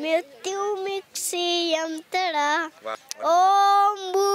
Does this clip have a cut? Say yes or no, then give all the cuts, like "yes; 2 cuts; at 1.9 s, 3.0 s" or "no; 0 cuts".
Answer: yes; 1 cut; at 2.9 s